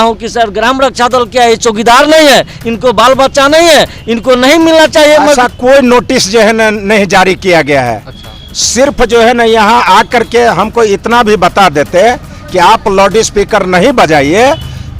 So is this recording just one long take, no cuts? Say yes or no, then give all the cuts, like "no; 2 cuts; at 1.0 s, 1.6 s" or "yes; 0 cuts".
no; 1 cut; at 5.4 s